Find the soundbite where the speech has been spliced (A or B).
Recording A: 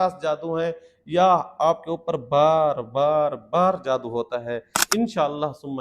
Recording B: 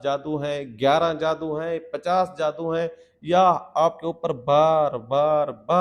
A